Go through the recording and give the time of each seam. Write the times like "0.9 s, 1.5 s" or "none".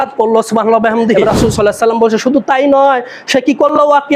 1.1 s